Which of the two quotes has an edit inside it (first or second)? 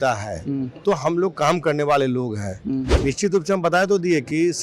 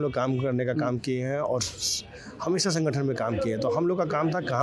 first